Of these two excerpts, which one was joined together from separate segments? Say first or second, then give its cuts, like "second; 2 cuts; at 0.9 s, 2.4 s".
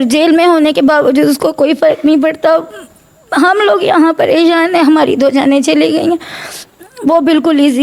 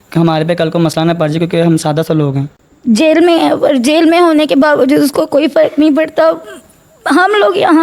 second; 1 cut; at 2.8 s